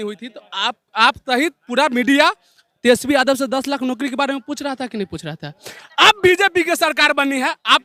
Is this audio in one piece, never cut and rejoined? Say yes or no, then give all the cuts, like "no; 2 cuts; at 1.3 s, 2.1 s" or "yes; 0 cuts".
yes; 0 cuts